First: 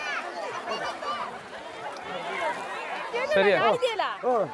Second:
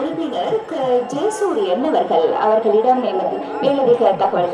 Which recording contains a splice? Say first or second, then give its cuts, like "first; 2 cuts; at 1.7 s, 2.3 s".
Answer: first; 1 cut; at 3.1 s